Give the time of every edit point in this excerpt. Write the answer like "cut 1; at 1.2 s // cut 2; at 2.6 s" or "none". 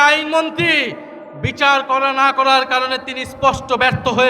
none